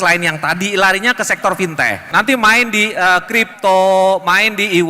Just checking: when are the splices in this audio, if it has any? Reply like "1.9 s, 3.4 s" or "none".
2.1 s